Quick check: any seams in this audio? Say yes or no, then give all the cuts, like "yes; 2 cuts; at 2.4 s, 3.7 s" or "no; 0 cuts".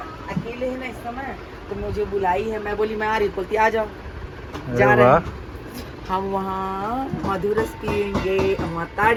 no; 0 cuts